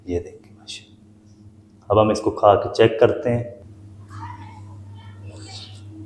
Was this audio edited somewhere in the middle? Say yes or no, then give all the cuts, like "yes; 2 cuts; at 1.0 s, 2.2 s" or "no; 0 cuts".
no; 0 cuts